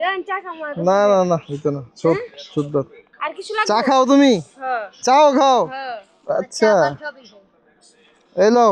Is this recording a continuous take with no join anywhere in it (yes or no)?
yes